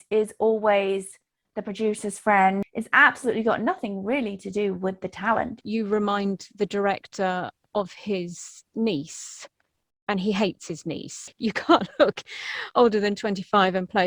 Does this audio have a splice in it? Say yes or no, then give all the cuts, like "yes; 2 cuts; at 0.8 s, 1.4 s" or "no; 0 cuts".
yes; 3 cuts; at 2.7 s, 5.6 s, 11.2 s